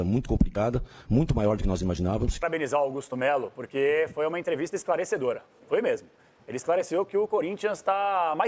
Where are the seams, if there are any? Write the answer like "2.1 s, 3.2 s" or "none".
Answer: 2.4 s